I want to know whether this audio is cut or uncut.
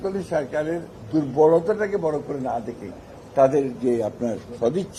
uncut